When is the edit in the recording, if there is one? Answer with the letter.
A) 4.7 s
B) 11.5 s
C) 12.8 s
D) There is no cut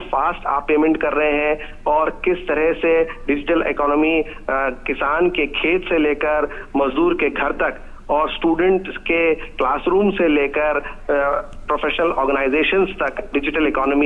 D